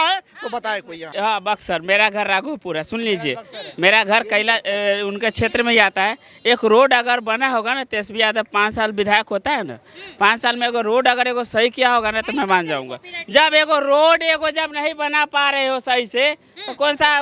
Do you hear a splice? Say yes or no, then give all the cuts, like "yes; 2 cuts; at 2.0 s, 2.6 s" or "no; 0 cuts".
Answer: yes; 1 cut; at 1.0 s